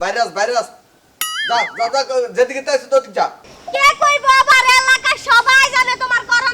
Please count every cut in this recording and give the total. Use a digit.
1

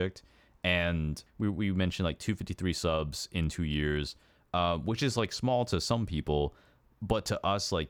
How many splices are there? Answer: 1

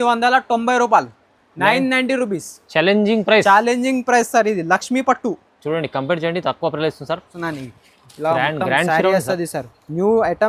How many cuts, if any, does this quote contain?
1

